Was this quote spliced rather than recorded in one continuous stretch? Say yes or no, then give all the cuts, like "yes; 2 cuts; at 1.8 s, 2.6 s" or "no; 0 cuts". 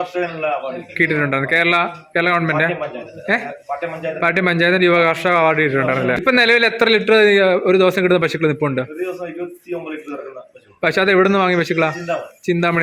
yes; 1 cut; at 6.2 s